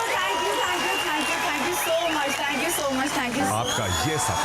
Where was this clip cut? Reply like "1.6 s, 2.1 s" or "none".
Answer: 3.4 s